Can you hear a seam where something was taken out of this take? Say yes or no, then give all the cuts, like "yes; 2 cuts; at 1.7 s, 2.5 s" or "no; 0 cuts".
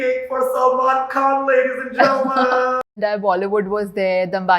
yes; 1 cut; at 2.8 s